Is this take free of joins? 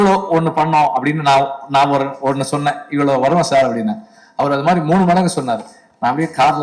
yes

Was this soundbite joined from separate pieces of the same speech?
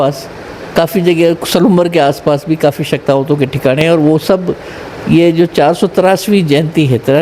no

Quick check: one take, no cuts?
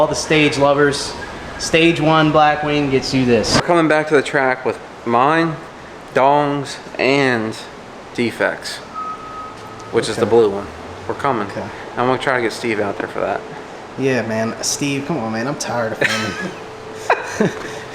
no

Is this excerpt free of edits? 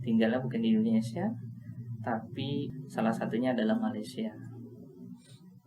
no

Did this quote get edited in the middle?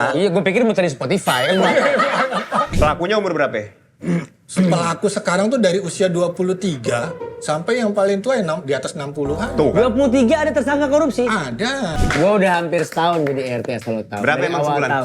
yes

